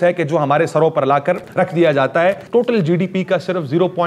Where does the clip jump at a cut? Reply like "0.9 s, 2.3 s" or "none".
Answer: 1.5 s, 2.4 s